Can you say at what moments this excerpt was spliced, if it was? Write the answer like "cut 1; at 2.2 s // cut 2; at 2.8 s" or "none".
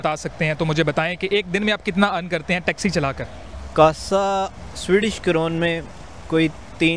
none